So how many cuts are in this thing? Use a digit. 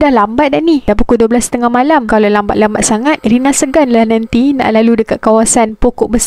0